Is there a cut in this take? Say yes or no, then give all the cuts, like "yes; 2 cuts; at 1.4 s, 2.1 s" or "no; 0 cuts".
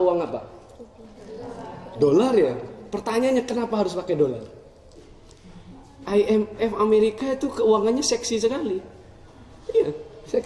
yes; 1 cut; at 5.0 s